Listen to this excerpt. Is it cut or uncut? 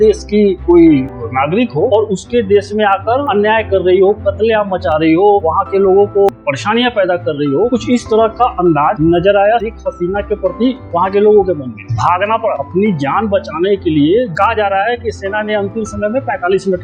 cut